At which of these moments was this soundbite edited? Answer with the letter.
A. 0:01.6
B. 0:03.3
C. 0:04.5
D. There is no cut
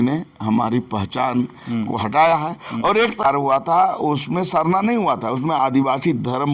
B